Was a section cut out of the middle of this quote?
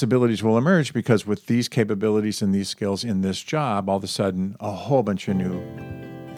no; 0 cuts

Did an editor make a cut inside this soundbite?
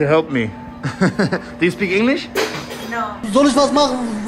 yes; 1 cut; at 3.2 s

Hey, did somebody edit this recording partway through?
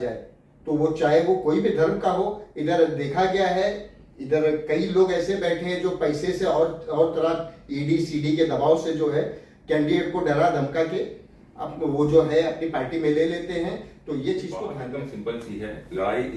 yes; 1 cut; at 14.8 s

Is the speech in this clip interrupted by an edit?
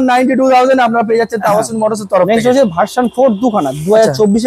no; 0 cuts

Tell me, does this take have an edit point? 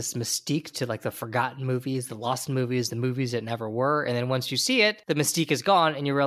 yes; 1 cut; at 5.0 s

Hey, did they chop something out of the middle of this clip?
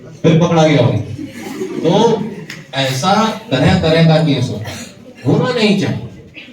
no; 0 cuts

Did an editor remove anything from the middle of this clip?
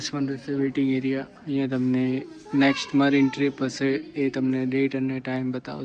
no; 0 cuts

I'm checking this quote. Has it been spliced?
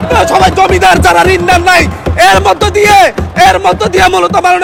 no; 0 cuts

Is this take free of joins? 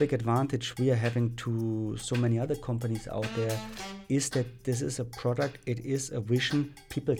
yes; 0 cuts

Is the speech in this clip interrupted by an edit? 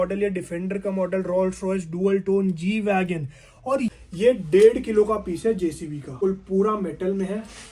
yes; 2 cuts; at 3.9 s, 6.2 s

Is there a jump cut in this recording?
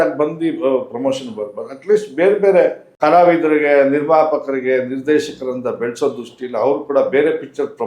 yes; 1 cut; at 3.0 s

